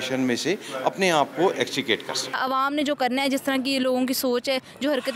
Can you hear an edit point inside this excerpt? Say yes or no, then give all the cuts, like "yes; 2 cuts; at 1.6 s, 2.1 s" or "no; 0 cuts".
yes; 1 cut; at 2.3 s